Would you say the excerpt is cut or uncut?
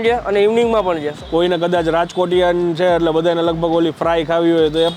cut